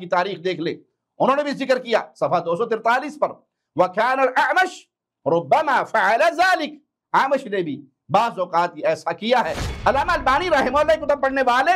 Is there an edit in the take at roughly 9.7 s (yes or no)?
yes